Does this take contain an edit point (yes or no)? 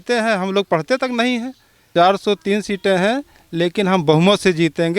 yes